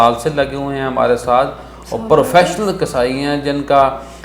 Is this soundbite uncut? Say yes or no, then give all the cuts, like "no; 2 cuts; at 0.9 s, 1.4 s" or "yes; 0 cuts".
yes; 0 cuts